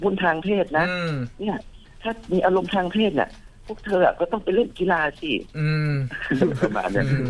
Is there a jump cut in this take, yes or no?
no